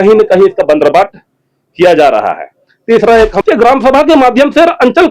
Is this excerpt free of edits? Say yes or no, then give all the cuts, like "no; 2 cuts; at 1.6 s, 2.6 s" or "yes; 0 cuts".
no; 1 cut; at 3.4 s